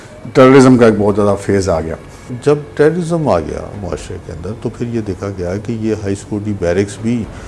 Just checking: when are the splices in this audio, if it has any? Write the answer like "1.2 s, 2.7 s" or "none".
2.3 s

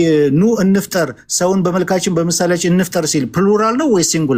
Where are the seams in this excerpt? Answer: none

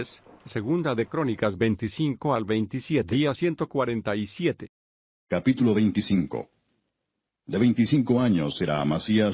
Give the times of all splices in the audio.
none

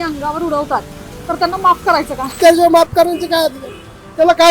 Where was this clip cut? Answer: 2.3 s

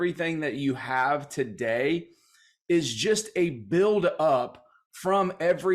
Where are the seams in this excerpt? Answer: none

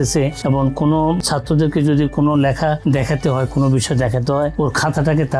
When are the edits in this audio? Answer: 1.2 s

